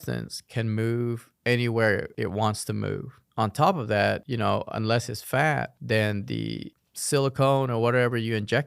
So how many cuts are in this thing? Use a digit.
3